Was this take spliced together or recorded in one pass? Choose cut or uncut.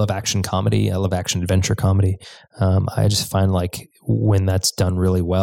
uncut